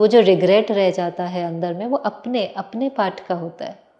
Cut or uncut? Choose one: uncut